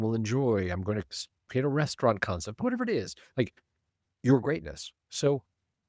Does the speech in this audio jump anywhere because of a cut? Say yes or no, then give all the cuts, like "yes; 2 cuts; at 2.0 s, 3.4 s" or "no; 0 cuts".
no; 0 cuts